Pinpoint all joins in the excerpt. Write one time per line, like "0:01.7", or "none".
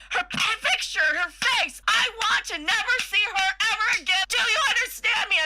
0:01.8
0:04.2